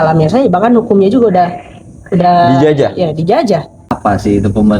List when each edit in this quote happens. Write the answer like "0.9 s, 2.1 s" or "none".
3.8 s